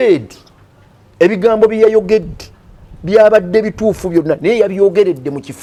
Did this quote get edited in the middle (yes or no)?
no